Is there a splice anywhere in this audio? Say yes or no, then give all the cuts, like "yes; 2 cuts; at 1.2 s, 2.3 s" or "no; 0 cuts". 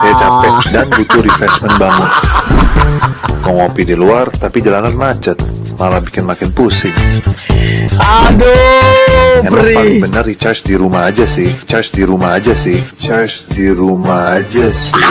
no; 0 cuts